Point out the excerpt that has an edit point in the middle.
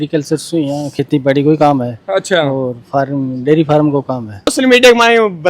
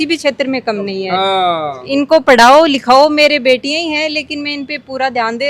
first; 1 cut; at 4.5 s

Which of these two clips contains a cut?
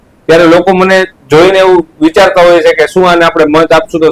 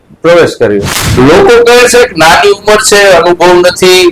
second; 1 cut; at 1.0 s

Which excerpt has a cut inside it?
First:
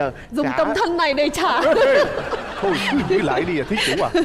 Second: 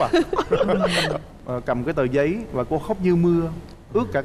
second; 1 cut; at 1.3 s

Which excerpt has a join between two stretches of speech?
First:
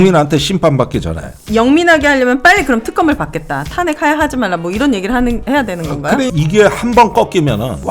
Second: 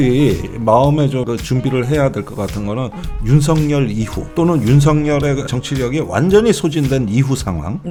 first; 2 cuts; at 1.3 s, 6.3 s

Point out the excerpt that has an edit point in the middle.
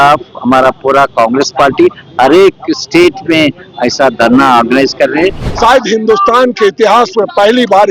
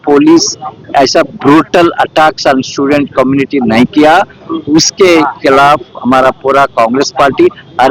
first; 1 cut; at 5.5 s

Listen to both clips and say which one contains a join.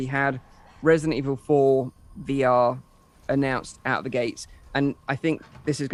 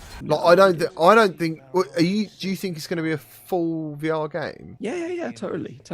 second; 1 cut; at 4.6 s

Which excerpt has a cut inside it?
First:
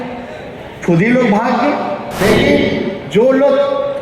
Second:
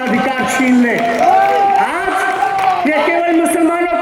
first; 1 cut; at 2.2 s

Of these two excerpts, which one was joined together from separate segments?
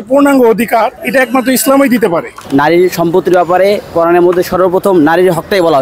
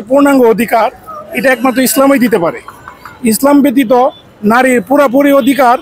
first; 2 cuts; at 1.0 s, 2.4 s

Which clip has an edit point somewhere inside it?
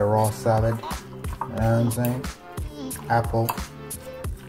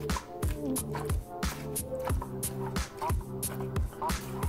first; 1 cut; at 3.6 s

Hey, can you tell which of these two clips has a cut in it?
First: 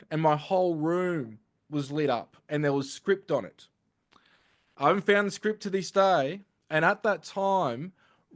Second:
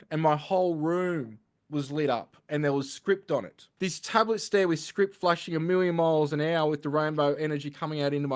second; 1 cut; at 3.6 s

